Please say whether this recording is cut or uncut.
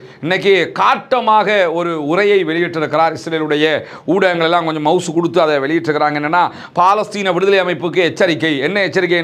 uncut